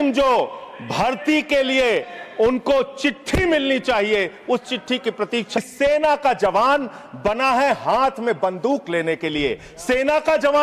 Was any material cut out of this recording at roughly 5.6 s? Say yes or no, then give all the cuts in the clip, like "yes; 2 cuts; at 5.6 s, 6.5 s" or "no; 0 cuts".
yes; 1 cut; at 5.6 s